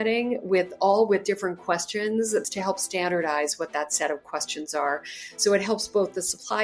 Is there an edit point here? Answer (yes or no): yes